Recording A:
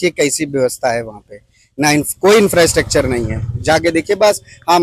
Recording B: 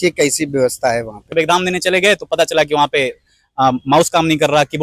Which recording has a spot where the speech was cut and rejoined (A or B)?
B